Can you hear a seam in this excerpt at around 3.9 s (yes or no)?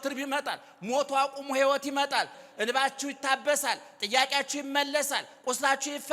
no